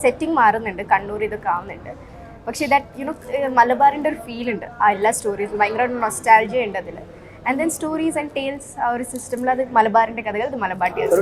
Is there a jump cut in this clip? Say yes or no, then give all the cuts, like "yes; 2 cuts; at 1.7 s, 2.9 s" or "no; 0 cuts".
no; 0 cuts